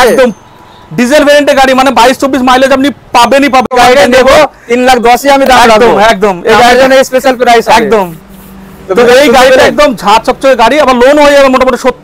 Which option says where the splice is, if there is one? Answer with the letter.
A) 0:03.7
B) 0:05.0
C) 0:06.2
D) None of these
A